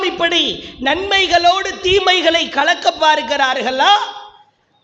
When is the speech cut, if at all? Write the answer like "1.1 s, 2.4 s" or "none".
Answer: none